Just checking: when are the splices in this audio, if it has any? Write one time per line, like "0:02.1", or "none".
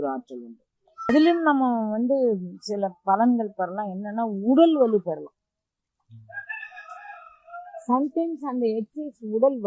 0:01.1